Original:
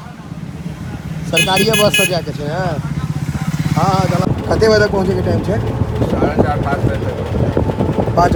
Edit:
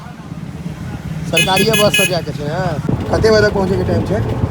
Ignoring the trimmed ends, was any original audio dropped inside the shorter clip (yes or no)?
yes